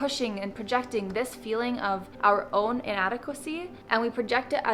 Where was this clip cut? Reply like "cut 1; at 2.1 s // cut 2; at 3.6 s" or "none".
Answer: none